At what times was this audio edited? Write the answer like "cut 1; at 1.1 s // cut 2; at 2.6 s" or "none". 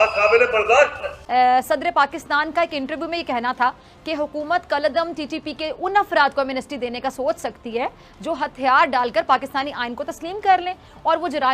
cut 1; at 1.2 s